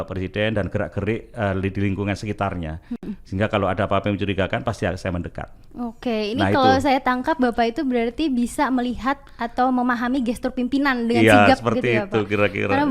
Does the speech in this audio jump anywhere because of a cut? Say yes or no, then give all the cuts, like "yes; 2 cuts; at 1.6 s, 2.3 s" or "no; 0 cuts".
no; 0 cuts